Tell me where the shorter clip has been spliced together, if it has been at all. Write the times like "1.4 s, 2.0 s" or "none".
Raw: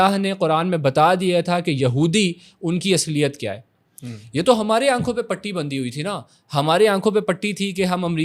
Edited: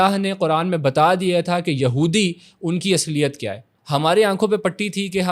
3.7 s